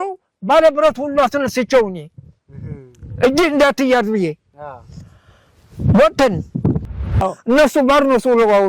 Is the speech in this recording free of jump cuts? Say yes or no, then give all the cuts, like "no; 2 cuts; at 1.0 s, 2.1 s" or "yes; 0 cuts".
no; 1 cut; at 7.1 s